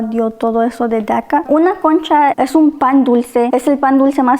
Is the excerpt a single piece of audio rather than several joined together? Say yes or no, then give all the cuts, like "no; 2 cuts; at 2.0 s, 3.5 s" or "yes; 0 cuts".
no; 3 cuts; at 1.4 s, 2.3 s, 3.5 s